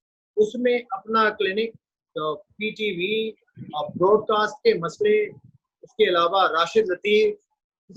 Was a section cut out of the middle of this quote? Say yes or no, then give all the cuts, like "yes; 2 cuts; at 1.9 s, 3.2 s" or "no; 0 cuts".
no; 0 cuts